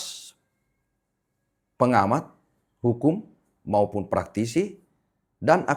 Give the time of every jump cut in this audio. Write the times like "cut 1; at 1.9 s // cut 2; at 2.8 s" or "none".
none